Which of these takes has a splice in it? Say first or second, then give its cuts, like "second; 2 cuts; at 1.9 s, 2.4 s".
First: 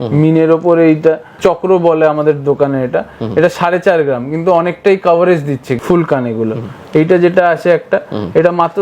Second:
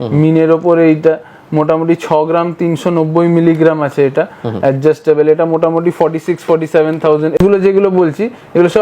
first; 2 cuts; at 1.4 s, 5.8 s